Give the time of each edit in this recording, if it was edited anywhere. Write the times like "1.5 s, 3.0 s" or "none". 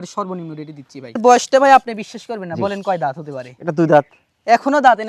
1.2 s